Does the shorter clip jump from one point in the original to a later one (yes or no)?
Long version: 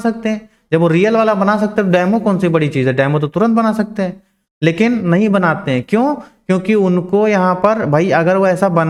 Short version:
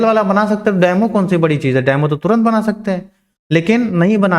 no